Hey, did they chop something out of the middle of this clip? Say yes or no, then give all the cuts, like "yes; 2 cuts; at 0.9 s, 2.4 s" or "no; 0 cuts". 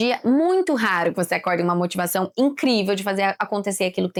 no; 0 cuts